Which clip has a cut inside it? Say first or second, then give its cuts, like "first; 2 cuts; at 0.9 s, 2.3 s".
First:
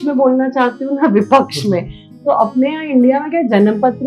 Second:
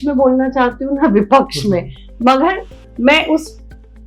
first; 1 cut; at 2.0 s